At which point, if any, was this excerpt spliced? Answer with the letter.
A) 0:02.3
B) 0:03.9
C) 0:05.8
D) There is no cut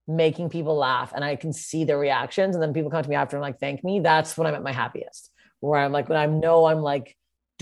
D